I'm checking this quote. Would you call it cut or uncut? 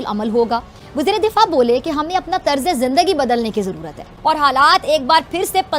uncut